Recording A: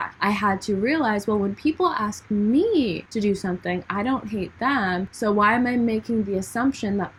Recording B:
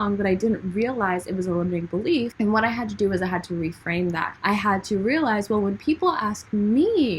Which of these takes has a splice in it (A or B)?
B